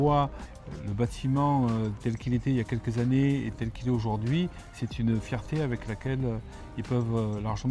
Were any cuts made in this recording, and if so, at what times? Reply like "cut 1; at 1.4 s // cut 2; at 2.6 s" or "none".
none